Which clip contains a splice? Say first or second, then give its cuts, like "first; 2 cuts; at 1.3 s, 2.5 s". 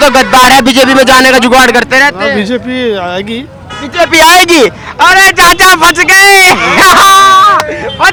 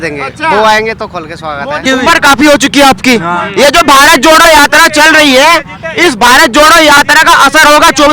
second; 1 cut; at 1.8 s